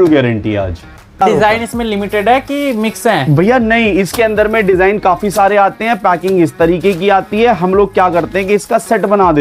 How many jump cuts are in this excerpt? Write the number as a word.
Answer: one